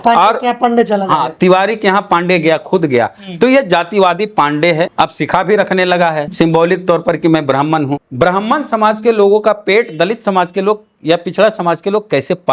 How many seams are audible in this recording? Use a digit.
3